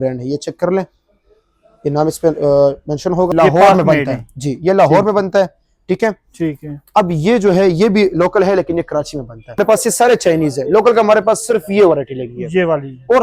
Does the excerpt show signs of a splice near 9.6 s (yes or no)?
yes